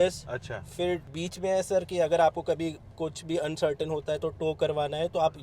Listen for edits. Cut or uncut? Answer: cut